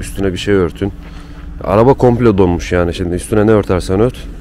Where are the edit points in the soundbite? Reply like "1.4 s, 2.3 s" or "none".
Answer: none